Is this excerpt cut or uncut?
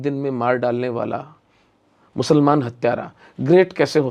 uncut